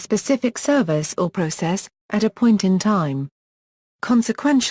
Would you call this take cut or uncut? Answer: cut